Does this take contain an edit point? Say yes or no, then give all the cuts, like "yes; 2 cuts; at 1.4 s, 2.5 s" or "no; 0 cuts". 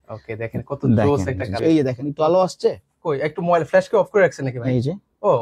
yes; 1 cut; at 1.6 s